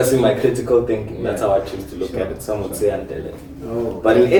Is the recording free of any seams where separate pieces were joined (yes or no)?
yes